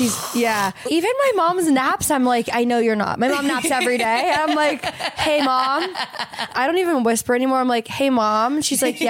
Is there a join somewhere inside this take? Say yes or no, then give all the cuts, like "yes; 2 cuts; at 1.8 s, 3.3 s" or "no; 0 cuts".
yes; 2 cuts; at 0.8 s, 6.5 s